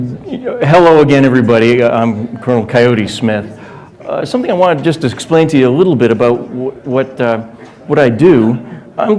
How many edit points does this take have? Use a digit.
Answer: 0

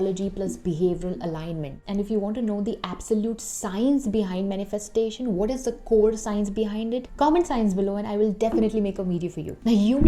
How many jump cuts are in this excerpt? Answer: 0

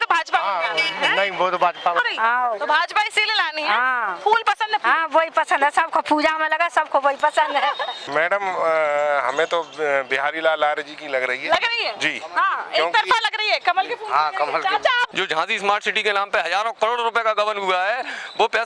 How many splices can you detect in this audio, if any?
3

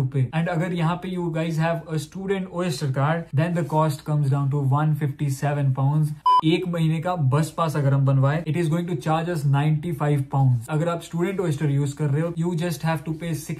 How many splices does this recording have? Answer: 1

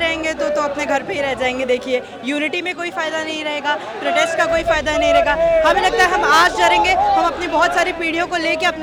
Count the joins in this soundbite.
0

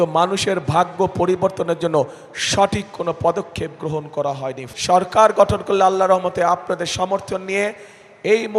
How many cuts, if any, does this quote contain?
1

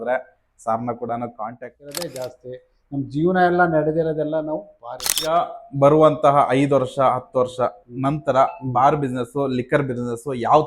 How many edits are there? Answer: 2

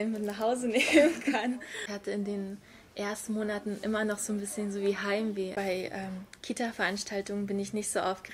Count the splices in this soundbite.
2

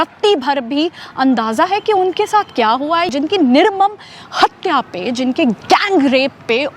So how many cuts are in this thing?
1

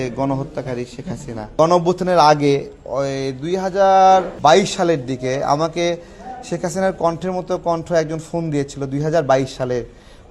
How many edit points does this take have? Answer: 2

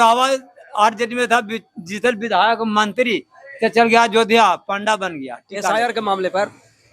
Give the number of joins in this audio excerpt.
1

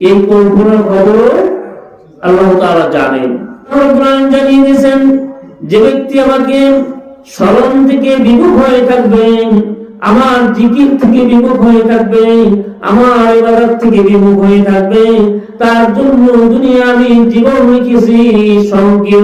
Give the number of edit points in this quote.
1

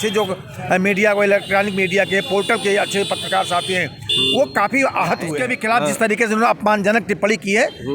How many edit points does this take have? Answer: 1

